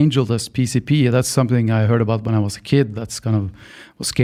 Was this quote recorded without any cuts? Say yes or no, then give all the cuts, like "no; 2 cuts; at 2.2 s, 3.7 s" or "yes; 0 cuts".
yes; 0 cuts